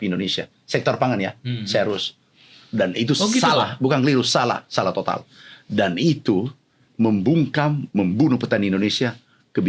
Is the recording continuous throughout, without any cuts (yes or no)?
yes